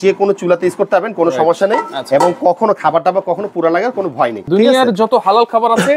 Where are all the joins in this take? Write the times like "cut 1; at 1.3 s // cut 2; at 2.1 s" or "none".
cut 1; at 4.5 s